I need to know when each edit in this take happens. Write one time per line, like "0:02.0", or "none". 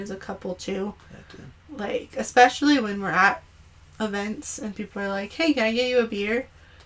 none